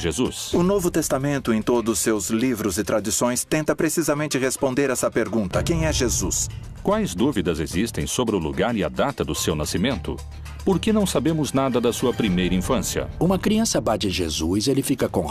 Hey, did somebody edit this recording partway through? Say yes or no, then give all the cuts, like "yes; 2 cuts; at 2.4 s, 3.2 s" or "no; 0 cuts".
no; 0 cuts